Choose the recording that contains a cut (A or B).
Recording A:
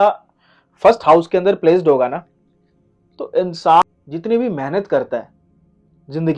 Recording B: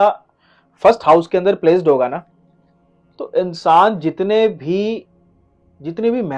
A